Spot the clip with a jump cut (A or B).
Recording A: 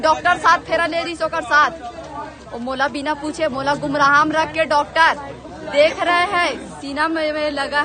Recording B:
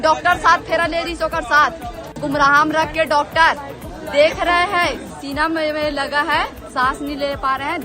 B